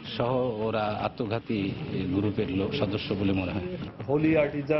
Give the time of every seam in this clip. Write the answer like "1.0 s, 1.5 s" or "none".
3.8 s